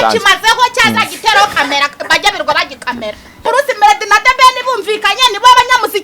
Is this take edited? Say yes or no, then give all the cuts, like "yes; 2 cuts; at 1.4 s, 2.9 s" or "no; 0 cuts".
yes; 1 cut; at 3.5 s